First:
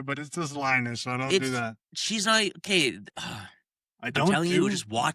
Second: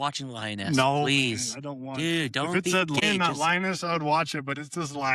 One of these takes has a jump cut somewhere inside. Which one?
second; 1 cut; at 3.0 s

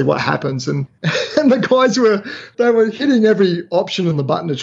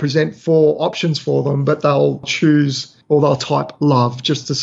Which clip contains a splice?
first; 1 cut; at 0.9 s

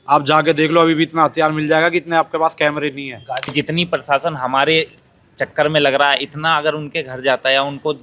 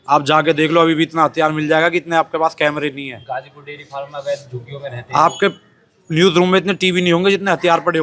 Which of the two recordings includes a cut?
first; 1 cut; at 3.5 s

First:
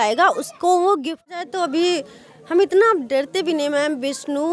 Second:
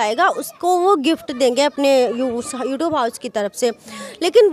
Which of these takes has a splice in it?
first; 1 cut; at 1.4 s

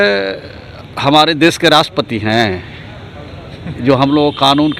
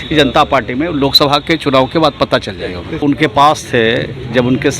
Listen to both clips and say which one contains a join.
second; 1 cut; at 3.0 s

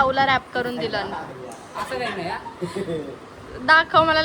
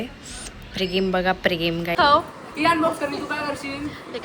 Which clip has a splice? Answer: second; 1 cut; at 1.9 s

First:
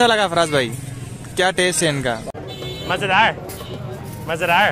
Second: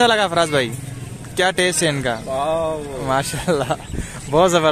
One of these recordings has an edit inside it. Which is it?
second; 1 cut; at 2.2 s

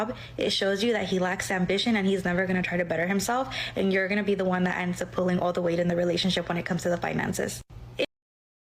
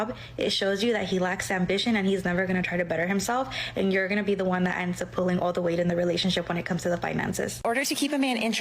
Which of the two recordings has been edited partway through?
second; 1 cut; at 7.6 s

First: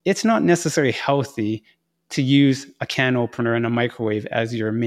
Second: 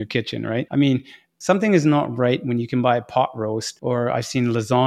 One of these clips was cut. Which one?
second; 1 cut; at 1.2 s

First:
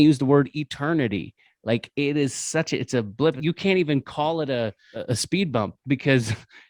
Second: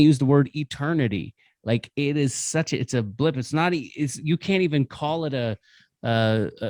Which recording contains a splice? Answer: first; 2 cuts; at 3.4 s, 4.9 s

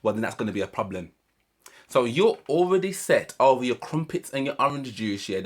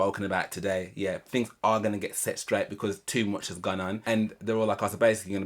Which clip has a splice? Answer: second; 1 cut; at 4.0 s

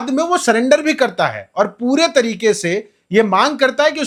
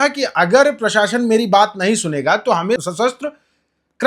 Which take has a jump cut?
second; 1 cut; at 2.8 s

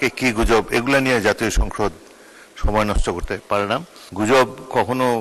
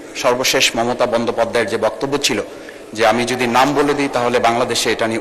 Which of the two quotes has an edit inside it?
first; 1 cut; at 4.0 s

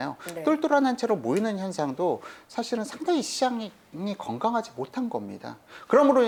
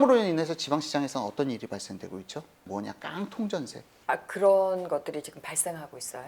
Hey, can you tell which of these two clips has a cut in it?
second; 2 cuts; at 2.7 s, 3.9 s

